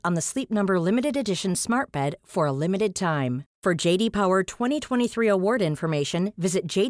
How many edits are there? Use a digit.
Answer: 0